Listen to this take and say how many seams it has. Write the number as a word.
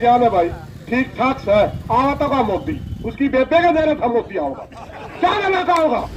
zero